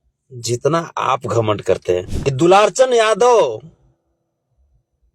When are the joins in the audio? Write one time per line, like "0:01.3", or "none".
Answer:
0:02.1